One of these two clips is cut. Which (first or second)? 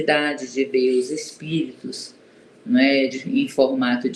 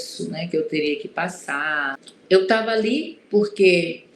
second